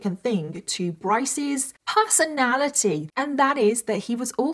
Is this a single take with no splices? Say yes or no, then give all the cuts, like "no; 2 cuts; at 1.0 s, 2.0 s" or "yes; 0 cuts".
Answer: no; 1 cut; at 3.1 s